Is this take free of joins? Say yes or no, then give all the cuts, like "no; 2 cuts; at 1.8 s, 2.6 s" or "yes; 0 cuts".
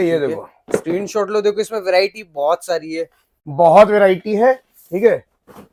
yes; 0 cuts